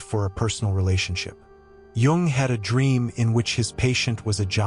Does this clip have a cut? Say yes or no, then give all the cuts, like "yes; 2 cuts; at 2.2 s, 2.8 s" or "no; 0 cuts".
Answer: yes; 1 cut; at 1.7 s